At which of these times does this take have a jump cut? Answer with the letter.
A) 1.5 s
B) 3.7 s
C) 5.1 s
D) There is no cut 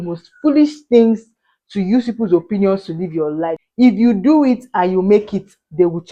B